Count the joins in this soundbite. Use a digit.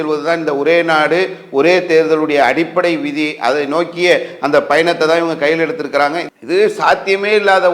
1